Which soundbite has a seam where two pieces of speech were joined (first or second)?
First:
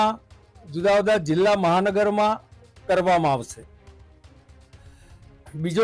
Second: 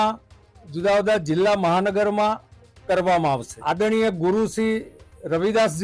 second